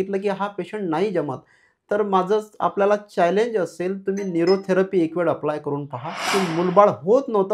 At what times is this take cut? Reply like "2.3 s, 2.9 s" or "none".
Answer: 6.3 s